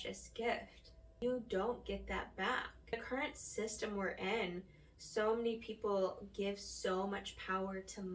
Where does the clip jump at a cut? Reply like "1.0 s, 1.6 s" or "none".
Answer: 1.2 s